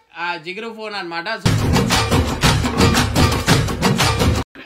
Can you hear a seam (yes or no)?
no